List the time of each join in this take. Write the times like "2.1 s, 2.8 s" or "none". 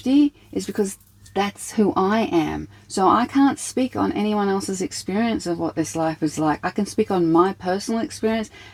none

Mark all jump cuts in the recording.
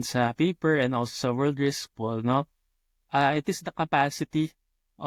none

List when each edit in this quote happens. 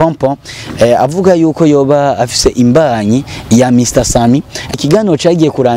4.7 s

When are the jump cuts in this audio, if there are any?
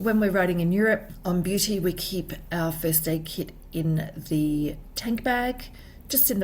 1.1 s

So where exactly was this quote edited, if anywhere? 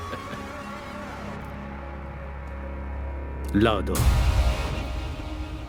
none

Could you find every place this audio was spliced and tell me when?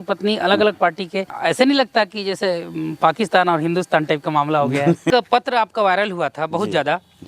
1.3 s, 5.1 s

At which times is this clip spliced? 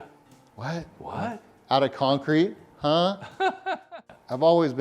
3.7 s

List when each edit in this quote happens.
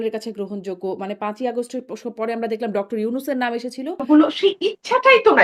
4.0 s

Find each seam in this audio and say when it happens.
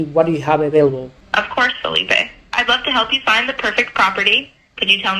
1.2 s

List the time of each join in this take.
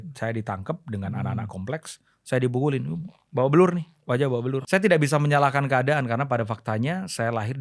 4.6 s

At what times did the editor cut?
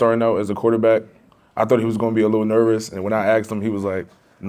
none

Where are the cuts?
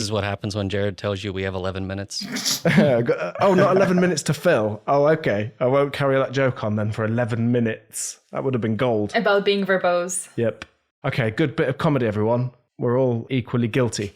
13.2 s

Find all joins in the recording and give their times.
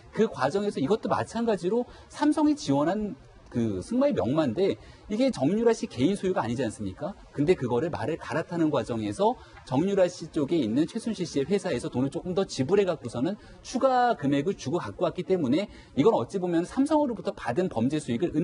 3.2 s

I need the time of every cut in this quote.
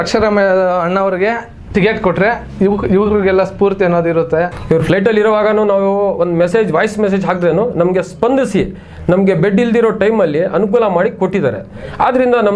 4.6 s

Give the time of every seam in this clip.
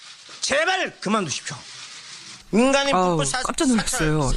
1.7 s

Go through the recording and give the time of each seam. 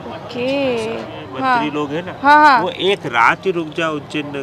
1.2 s

